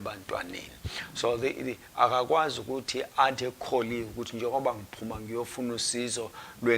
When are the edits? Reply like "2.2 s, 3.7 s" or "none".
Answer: 5.9 s